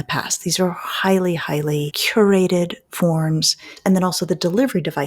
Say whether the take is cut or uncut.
cut